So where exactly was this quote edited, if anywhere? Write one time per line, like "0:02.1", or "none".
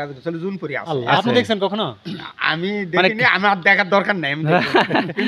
none

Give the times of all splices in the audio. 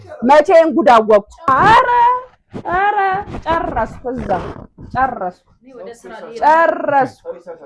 0:01.5

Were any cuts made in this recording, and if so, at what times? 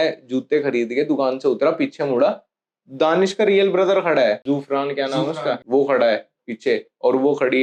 0:04.4
0:05.6

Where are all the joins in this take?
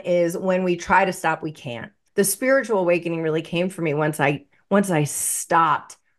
0:02.0

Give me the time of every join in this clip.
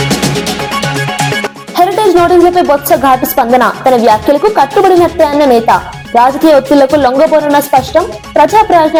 none

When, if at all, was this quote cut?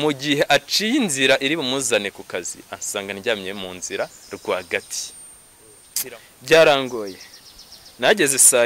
0:05.9

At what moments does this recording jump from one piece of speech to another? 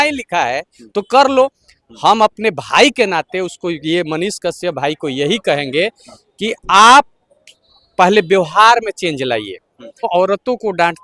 0:10.1

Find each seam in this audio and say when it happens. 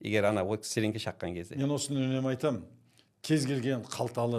none

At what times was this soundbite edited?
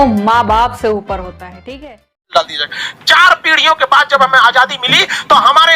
0:02.0

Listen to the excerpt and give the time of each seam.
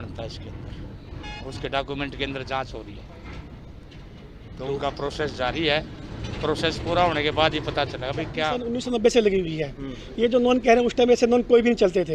0:08.5

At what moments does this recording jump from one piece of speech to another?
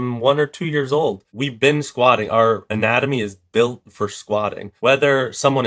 0:01.3
0:04.7

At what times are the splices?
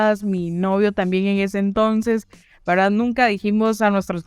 none

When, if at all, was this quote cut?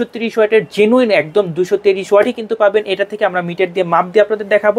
none

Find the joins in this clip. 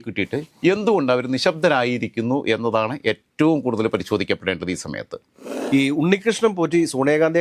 0:05.5

